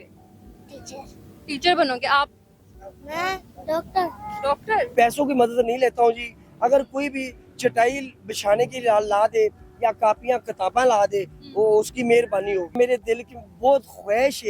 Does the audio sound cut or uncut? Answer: cut